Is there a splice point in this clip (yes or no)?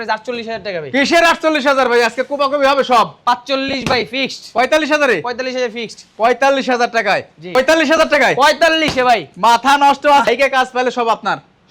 no